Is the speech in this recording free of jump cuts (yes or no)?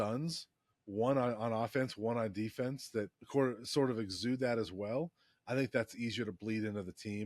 no